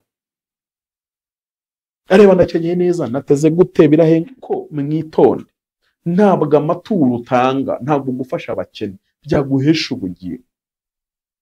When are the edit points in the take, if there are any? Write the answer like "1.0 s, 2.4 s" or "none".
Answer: 4.7 s